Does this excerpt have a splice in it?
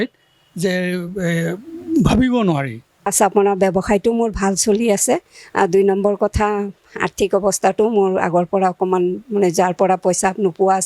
yes; 1 cut; at 3.1 s

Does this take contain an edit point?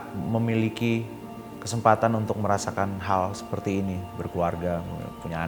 no; 0 cuts

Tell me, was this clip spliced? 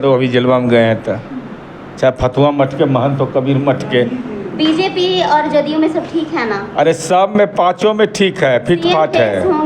no; 0 cuts

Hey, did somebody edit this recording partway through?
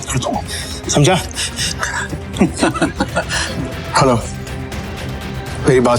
yes; 1 cut; at 3.4 s

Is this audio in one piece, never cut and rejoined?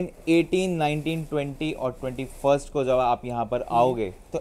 yes; 0 cuts

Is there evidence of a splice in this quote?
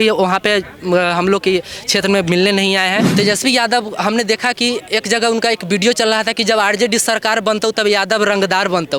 yes; 1 cut; at 3.1 s

